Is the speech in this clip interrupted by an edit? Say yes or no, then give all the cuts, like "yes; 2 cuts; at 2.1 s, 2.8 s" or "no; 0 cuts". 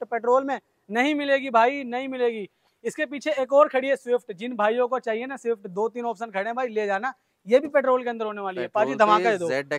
no; 0 cuts